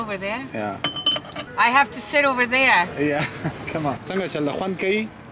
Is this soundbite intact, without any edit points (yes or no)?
no